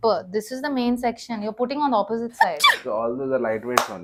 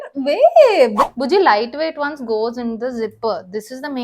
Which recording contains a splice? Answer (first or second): second